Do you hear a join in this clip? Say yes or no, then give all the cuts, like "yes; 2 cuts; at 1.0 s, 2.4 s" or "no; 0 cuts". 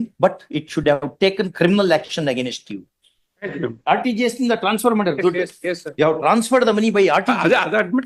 yes; 2 cuts; at 3.5 s, 5.8 s